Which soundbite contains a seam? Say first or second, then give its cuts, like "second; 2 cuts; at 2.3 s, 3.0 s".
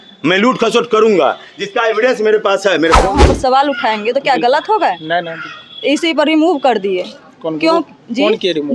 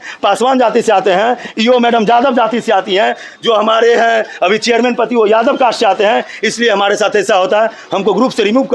first; 1 cut; at 3.1 s